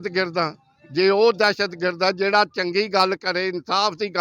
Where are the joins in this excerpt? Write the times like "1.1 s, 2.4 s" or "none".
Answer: none

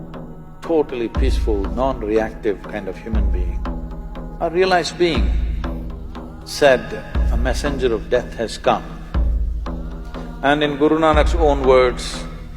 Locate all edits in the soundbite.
none

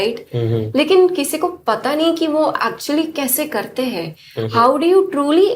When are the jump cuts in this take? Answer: none

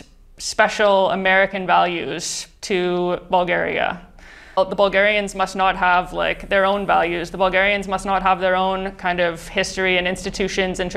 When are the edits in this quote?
4.6 s

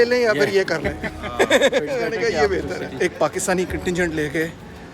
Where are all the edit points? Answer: 2.9 s

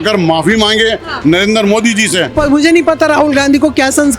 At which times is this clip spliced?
2.3 s

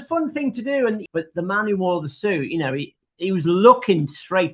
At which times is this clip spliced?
1.0 s

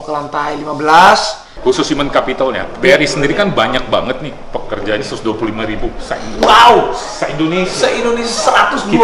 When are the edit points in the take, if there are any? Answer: 1.4 s

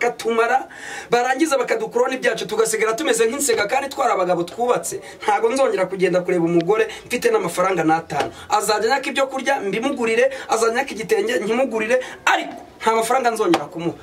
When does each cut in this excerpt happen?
none

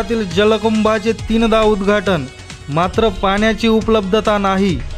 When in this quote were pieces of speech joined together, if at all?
none

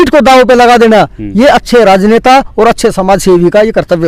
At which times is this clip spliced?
none

